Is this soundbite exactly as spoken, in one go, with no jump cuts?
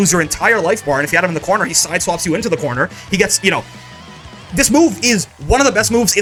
yes; 0 cuts

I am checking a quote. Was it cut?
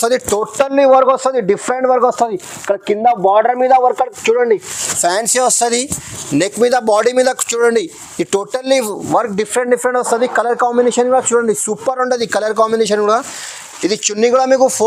no; 0 cuts

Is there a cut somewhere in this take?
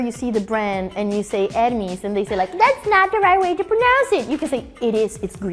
no; 0 cuts

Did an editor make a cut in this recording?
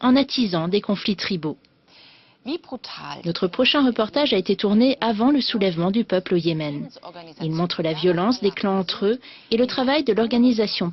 yes; 1 cut; at 7.7 s

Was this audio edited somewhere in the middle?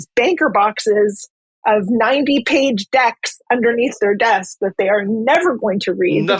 no; 0 cuts

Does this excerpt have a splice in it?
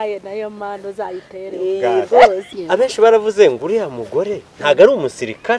yes; 1 cut; at 2.5 s

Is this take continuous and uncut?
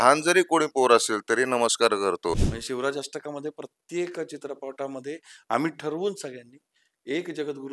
no; 1 cut; at 2.5 s

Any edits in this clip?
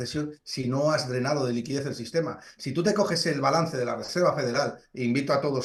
no; 0 cuts

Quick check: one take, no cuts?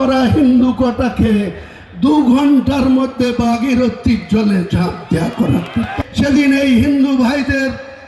no; 1 cut; at 6.0 s

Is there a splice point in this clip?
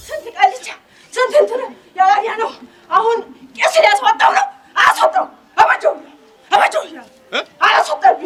no; 0 cuts

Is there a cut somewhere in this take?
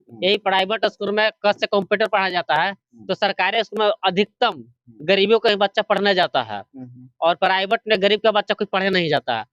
no; 0 cuts

